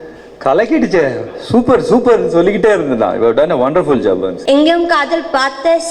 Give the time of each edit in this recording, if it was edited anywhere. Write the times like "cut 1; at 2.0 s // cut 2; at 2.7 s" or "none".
cut 1; at 4.4 s

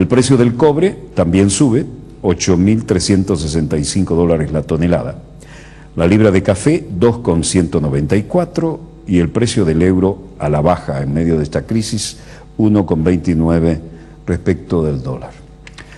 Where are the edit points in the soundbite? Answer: cut 1; at 2.9 s

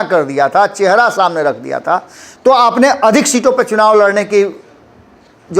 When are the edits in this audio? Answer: none

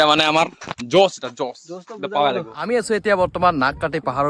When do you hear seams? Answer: cut 1; at 2.7 s

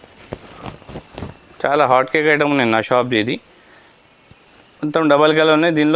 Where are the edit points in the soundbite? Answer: none

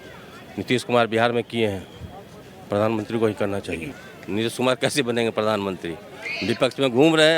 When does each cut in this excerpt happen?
cut 1; at 3.9 s

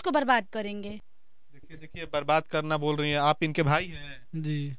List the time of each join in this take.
none

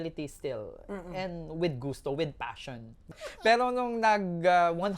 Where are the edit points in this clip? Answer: cut 1; at 3.2 s

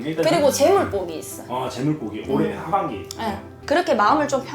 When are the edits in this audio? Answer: cut 1; at 3.5 s

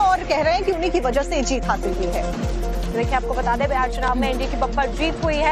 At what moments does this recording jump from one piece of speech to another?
cut 1; at 2.3 s

